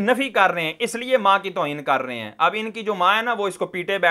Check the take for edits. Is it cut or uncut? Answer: uncut